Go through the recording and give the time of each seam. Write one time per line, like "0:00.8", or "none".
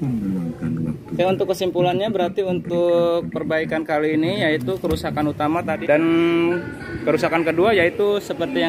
0:05.8